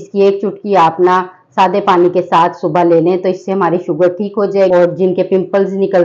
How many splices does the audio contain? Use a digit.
1